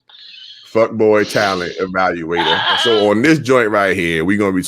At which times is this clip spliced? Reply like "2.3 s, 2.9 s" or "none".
2.8 s